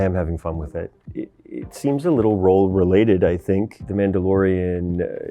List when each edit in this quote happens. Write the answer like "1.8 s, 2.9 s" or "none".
1.2 s, 3.7 s